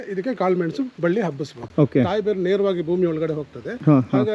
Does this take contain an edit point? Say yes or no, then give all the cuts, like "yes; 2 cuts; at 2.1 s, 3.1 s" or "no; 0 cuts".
yes; 1 cut; at 1.6 s